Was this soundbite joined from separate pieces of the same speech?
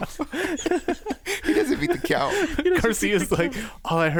no; 0 cuts

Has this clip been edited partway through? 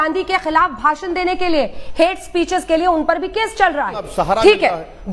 yes; 1 cut; at 4.1 s

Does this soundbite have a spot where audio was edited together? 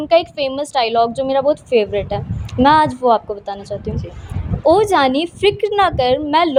no; 0 cuts

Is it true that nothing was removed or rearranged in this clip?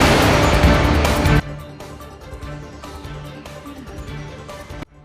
no; 1 cut; at 1.0 s

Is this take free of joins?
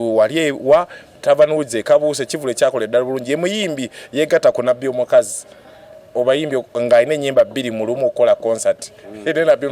yes; 0 cuts

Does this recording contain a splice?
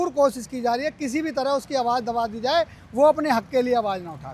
no; 0 cuts

